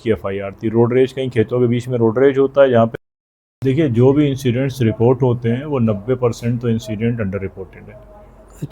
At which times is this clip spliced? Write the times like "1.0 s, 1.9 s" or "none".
3.3 s

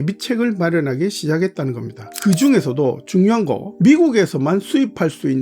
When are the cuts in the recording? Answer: 1.9 s

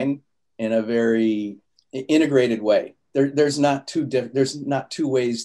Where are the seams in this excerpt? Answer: none

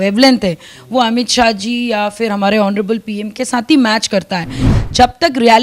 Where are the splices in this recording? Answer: 4.6 s

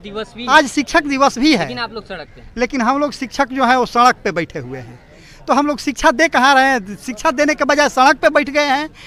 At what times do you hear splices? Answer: none

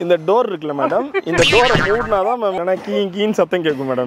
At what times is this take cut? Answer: 2.6 s

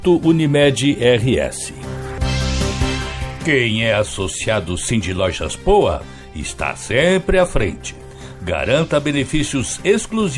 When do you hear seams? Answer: 2.1 s, 3.4 s

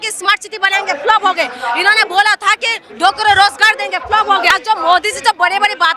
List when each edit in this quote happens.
4.5 s

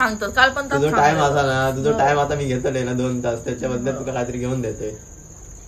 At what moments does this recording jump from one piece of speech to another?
none

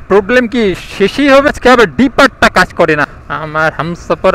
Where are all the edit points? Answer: 1.5 s, 3.1 s

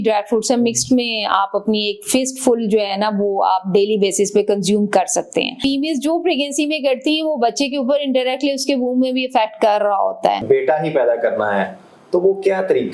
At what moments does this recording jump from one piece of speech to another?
5.6 s, 10.4 s

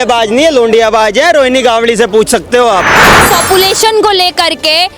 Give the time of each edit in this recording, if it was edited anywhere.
3.3 s

